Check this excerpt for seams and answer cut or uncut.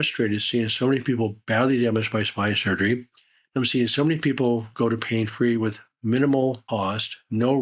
cut